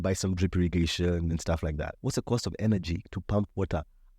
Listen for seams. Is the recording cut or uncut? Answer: cut